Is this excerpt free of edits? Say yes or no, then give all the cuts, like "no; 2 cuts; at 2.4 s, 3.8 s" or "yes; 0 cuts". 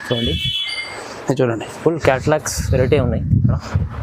yes; 0 cuts